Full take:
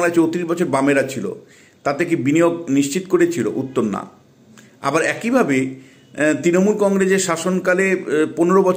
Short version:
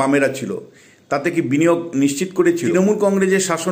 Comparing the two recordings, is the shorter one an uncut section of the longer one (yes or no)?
no